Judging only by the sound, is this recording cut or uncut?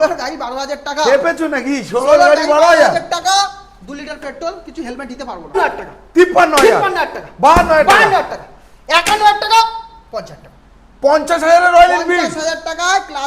cut